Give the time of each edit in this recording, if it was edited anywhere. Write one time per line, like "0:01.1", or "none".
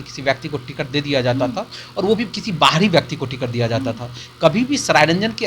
none